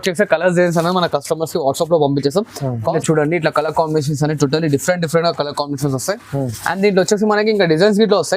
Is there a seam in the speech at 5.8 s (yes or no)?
no